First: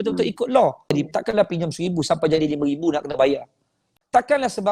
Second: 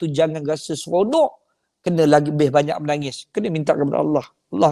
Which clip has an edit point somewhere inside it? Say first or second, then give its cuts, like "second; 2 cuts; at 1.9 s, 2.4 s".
first; 2 cuts; at 0.9 s, 3.9 s